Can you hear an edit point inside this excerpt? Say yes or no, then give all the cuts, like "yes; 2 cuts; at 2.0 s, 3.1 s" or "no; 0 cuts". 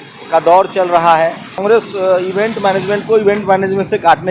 yes; 1 cut; at 1.6 s